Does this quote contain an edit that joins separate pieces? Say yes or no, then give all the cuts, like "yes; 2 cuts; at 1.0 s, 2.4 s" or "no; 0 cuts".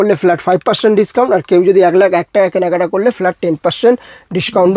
no; 0 cuts